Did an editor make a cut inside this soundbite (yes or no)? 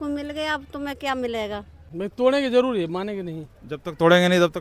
yes